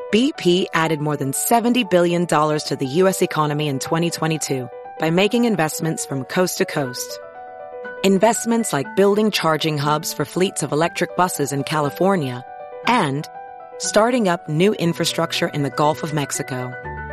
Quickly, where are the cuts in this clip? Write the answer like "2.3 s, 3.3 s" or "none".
none